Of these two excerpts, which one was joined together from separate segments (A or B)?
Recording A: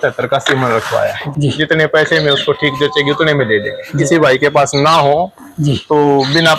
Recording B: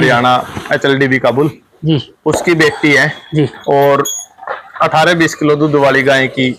A